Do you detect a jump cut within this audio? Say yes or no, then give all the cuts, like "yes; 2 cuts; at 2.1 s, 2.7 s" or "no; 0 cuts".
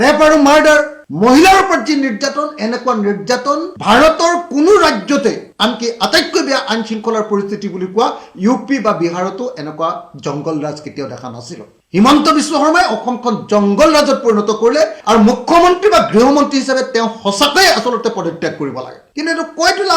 yes; 1 cut; at 15.0 s